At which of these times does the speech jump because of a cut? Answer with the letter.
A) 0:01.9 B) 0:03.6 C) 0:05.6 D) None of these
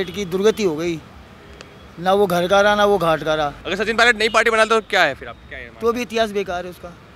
B